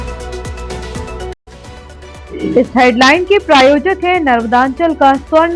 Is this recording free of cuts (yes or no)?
no